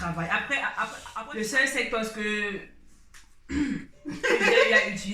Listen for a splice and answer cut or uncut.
cut